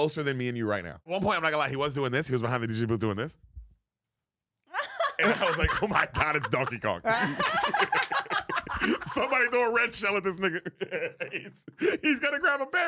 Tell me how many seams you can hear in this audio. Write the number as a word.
one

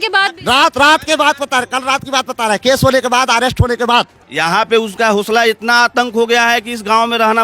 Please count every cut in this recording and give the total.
one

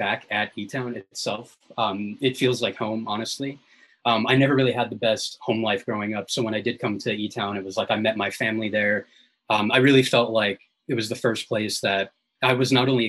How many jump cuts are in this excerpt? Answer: zero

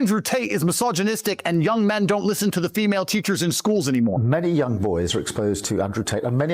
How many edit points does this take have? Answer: one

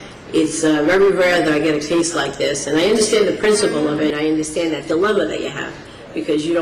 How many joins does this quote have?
one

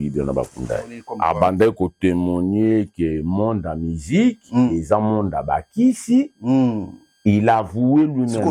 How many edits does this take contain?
one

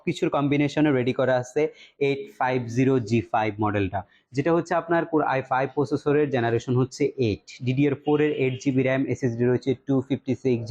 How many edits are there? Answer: zero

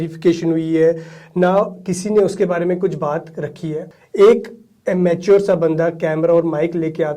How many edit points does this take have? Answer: one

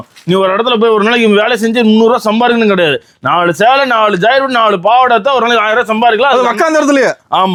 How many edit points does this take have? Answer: zero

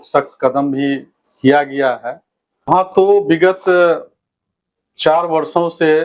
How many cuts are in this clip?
one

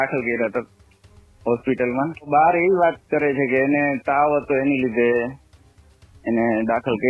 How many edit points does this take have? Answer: one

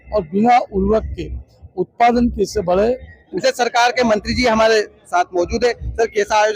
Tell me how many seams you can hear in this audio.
one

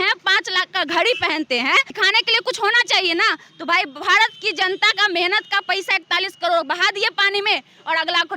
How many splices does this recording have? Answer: one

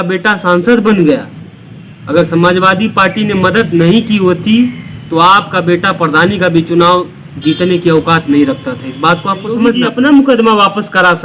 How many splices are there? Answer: one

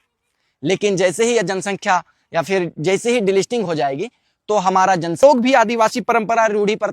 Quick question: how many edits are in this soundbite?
one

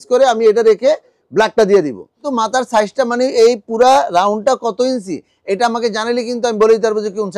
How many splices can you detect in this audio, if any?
one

